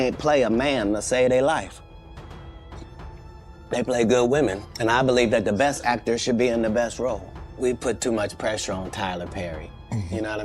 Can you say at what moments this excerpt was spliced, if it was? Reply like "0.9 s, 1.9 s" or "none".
1.7 s, 3.7 s